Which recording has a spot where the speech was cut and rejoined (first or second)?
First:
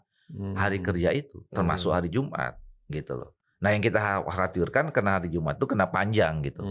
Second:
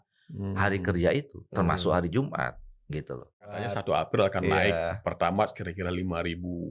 second